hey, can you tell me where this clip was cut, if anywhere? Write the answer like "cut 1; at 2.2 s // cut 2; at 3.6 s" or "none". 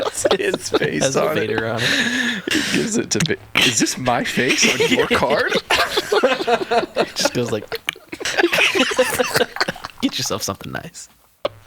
none